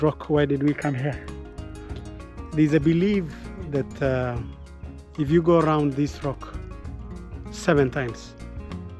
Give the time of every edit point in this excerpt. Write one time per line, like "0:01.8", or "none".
none